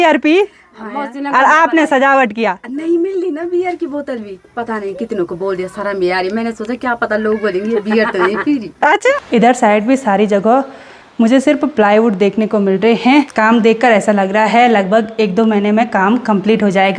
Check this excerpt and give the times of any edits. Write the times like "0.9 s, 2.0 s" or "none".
9.1 s, 13.3 s